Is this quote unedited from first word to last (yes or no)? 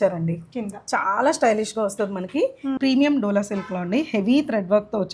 no